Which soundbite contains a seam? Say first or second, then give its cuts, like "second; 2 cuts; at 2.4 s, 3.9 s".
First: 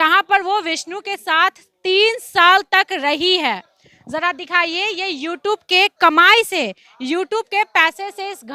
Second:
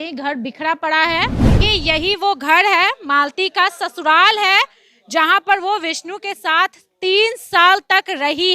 second; 1 cut; at 1.6 s